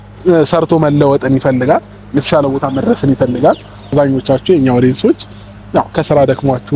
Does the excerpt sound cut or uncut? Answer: cut